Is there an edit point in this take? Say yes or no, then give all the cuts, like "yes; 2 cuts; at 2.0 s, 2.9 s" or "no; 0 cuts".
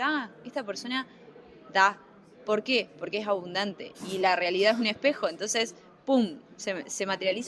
no; 0 cuts